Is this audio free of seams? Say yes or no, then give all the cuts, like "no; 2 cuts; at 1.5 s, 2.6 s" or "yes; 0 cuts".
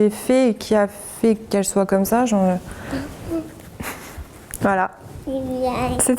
no; 1 cut; at 4.6 s